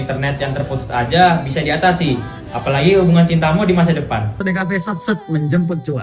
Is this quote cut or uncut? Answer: cut